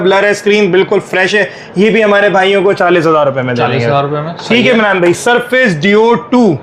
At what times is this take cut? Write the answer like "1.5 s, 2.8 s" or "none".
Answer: none